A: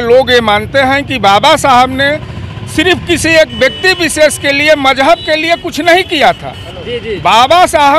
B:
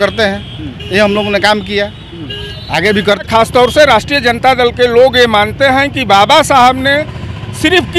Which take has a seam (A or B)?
B